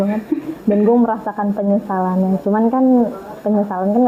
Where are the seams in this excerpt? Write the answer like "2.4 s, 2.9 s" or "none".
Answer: none

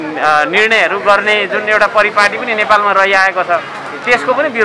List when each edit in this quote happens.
none

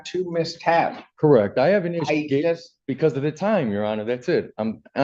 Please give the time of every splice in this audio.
none

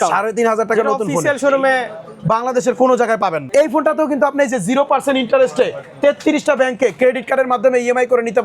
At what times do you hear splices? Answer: 3.4 s

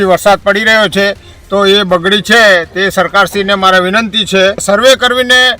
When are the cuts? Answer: 4.6 s

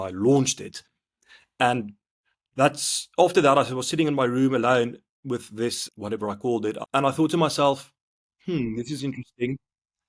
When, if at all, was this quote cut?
5.8 s, 6.8 s

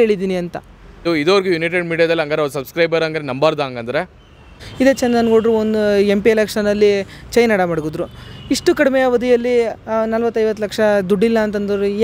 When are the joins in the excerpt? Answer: 1.0 s, 4.6 s

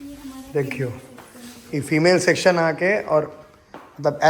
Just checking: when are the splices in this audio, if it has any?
none

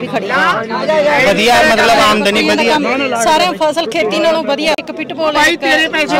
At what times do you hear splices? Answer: 4.8 s

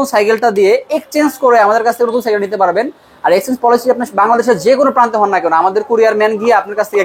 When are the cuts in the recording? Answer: none

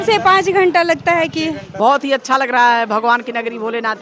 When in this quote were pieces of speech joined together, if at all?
1.6 s

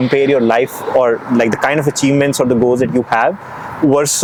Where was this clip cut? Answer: none

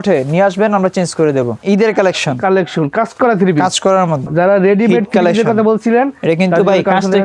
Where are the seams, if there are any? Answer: 1.6 s, 4.2 s

